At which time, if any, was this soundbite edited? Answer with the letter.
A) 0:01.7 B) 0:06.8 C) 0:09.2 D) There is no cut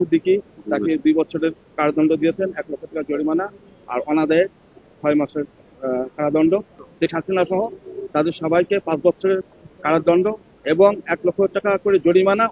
B